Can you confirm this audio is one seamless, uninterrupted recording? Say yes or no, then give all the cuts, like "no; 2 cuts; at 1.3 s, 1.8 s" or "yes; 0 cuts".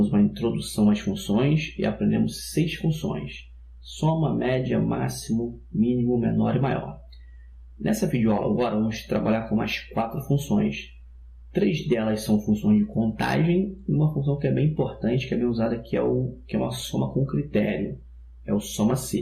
no; 1 cut; at 2.5 s